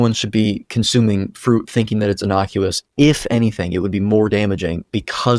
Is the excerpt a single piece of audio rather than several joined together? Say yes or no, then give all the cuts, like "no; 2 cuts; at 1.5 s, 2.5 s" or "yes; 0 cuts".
yes; 0 cuts